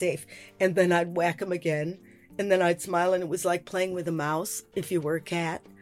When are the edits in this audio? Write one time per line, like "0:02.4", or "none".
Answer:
none